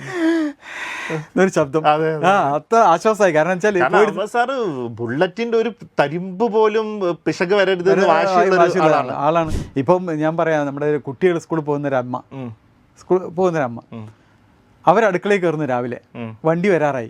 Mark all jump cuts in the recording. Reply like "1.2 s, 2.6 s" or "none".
9.6 s